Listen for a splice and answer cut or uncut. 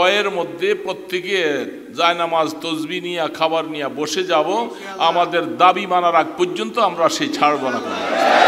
uncut